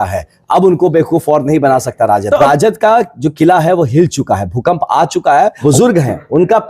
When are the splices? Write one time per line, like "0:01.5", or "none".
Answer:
0:02.4
0:05.6